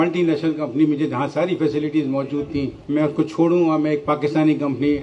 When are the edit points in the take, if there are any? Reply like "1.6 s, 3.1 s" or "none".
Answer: none